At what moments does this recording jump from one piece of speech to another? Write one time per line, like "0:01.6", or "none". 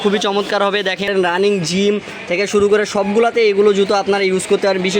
0:01.1